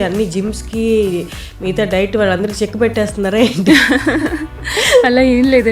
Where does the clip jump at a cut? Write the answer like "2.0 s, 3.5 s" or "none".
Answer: none